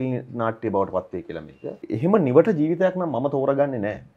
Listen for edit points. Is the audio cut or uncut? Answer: cut